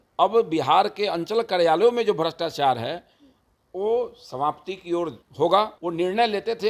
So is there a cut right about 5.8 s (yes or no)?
yes